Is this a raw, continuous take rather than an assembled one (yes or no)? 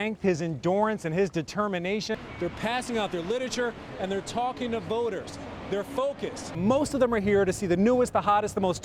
no